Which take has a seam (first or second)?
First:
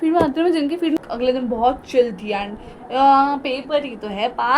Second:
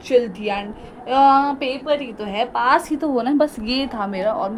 first